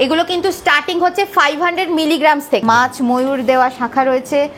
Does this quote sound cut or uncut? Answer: cut